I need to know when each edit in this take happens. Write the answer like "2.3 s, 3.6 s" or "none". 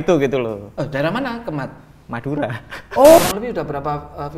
3.2 s